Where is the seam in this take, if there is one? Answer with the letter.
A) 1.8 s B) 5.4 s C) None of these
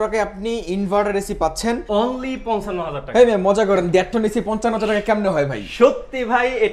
A